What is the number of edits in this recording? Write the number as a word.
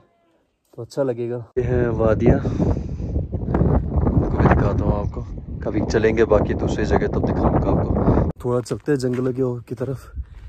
two